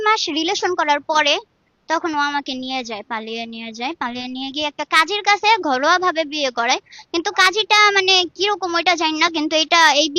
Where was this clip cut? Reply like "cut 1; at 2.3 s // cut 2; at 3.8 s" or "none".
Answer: none